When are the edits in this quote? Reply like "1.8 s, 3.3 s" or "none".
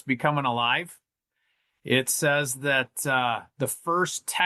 none